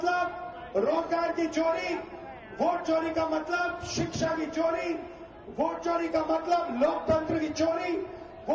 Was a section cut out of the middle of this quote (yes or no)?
no